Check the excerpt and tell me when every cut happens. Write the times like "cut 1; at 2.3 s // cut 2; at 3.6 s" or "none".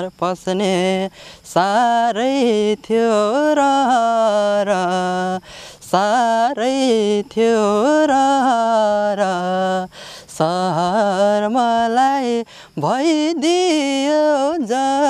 none